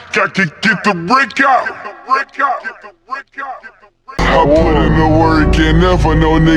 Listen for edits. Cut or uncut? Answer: uncut